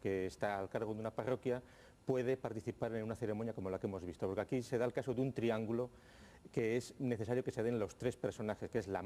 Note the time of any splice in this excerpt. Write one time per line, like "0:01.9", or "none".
0:03.3